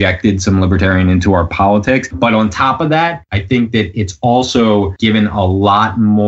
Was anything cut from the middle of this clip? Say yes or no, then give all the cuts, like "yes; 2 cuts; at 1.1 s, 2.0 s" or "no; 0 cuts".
yes; 3 cuts; at 2.1 s, 3.3 s, 4.9 s